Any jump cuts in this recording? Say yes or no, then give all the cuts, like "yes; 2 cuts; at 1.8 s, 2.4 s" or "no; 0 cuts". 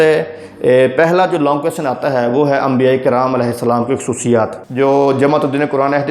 yes; 1 cut; at 4.6 s